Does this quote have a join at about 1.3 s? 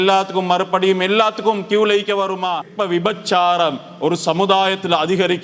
no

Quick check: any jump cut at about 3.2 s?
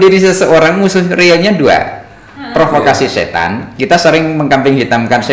no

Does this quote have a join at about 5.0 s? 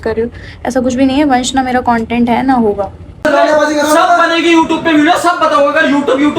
no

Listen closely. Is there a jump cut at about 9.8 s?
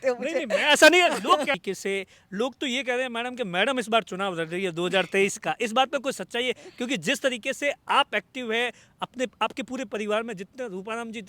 no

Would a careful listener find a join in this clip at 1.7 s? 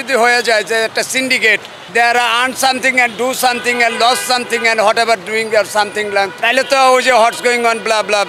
yes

